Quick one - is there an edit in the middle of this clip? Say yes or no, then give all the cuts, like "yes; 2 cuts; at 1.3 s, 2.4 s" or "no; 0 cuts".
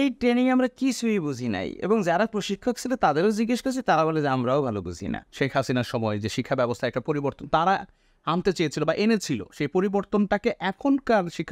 yes; 1 cut; at 5.2 s